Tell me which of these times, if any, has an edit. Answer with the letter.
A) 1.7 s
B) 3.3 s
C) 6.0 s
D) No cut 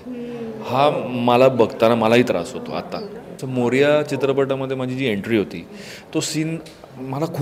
B